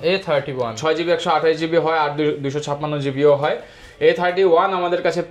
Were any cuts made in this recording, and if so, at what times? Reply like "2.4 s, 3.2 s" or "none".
none